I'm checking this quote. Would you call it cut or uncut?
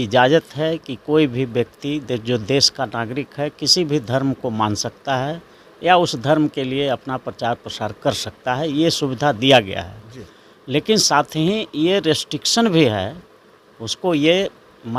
uncut